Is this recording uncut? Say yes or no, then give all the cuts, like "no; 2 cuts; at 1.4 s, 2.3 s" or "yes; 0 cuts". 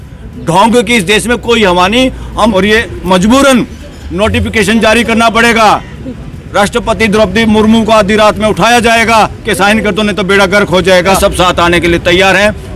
no; 2 cuts; at 2.5 s, 11.2 s